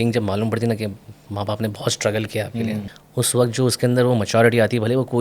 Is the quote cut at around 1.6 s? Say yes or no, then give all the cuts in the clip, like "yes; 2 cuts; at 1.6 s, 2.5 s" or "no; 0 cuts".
no; 1 cut; at 2.9 s